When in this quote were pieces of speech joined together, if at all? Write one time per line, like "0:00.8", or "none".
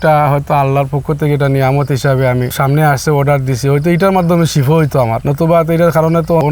none